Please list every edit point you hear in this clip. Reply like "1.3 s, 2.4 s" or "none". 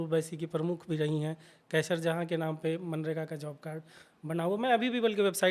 none